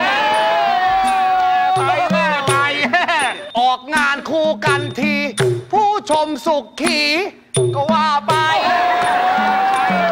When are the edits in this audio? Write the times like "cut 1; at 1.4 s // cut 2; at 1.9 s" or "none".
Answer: cut 1; at 3.4 s